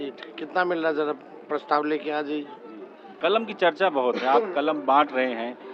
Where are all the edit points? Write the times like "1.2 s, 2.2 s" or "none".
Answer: 3.1 s